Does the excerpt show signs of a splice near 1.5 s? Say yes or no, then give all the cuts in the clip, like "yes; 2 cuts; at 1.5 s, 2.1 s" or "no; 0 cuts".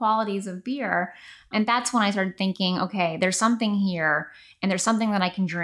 yes; 1 cut; at 1.5 s